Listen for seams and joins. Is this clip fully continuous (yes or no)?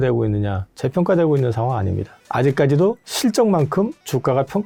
yes